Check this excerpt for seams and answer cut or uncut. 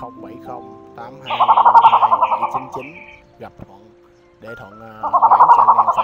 cut